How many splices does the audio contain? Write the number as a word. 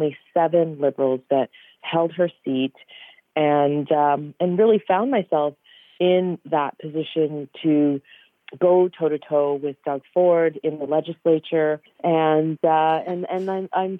one